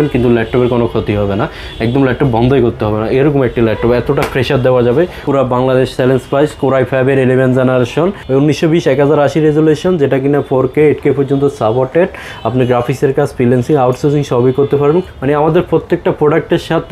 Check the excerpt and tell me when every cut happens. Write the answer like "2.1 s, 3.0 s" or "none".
5.2 s, 8.2 s, 15.1 s